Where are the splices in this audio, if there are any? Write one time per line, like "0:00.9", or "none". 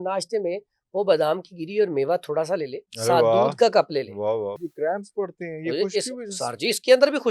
0:04.6